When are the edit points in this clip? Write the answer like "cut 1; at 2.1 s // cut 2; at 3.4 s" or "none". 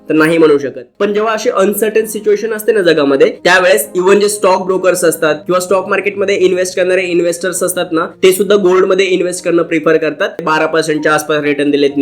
cut 1; at 0.9 s // cut 2; at 10.4 s